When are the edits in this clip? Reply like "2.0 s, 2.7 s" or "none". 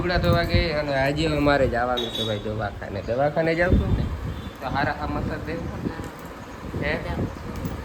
none